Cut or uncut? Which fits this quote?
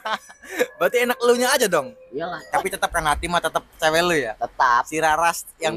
cut